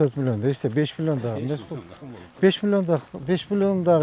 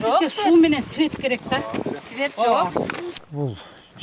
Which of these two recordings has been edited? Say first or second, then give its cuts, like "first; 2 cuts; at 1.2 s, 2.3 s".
second; 1 cut; at 3.1 s